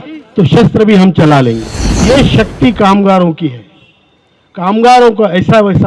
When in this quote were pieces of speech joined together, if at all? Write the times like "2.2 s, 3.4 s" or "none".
2.0 s